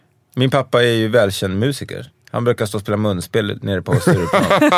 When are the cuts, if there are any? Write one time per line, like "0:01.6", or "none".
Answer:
none